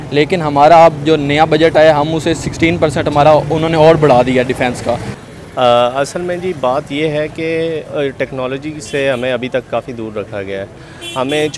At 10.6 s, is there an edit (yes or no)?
no